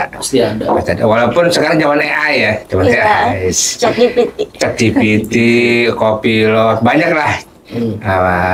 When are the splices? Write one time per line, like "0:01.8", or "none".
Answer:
none